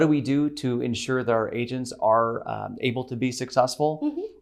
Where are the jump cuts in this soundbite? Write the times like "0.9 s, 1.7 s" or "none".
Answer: none

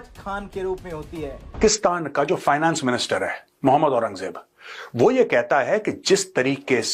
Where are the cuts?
1.7 s

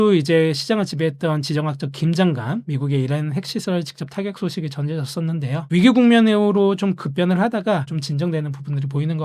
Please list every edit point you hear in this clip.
7.9 s

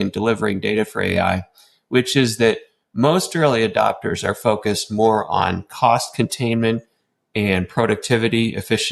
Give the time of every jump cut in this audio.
none

